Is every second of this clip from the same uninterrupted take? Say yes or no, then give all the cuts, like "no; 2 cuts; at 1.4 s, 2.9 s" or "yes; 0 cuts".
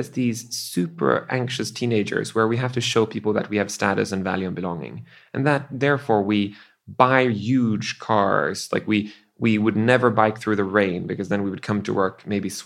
yes; 0 cuts